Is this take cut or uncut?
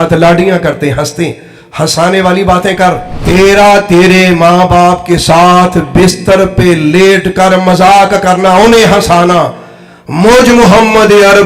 cut